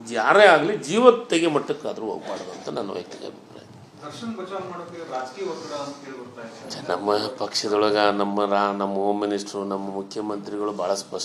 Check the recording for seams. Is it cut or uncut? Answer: uncut